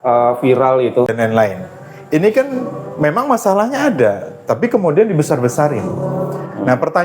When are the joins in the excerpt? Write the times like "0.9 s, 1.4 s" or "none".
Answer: 1.1 s